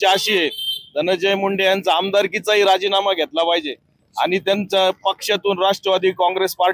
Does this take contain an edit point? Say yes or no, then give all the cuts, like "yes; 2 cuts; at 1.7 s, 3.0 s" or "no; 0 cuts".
no; 0 cuts